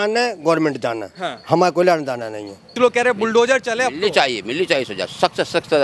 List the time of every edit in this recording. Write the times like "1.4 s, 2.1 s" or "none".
2.7 s